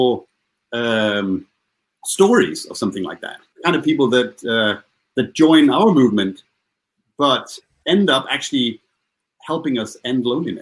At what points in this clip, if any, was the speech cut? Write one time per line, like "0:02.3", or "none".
0:03.5